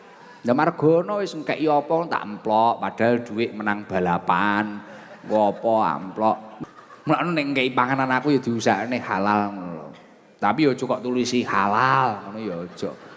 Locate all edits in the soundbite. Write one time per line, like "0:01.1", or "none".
0:06.5